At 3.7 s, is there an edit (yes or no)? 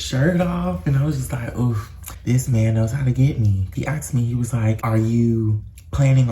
yes